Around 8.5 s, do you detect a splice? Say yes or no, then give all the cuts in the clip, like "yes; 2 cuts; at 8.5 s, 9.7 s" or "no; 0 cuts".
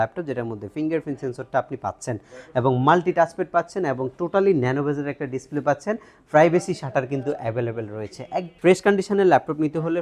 yes; 1 cut; at 8.5 s